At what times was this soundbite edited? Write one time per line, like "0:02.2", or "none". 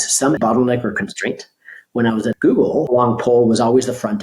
0:02.4